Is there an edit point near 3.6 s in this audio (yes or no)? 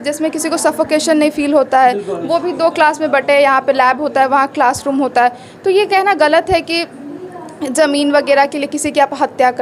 no